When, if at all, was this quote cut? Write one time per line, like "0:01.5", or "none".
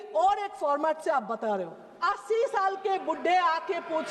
0:02.0